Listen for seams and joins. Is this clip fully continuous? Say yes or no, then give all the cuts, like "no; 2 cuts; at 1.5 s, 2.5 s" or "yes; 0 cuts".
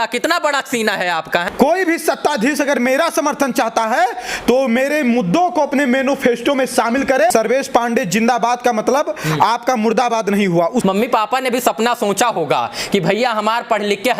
no; 3 cuts; at 1.5 s, 7.3 s, 10.8 s